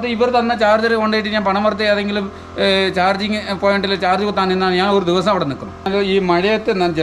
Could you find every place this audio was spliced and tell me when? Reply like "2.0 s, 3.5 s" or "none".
5.9 s